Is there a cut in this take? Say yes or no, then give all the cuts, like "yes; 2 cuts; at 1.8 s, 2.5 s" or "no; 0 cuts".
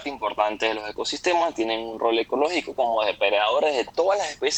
no; 0 cuts